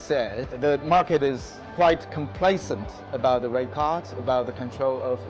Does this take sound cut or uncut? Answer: uncut